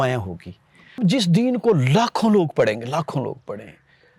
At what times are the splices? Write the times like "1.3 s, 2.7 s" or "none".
1.0 s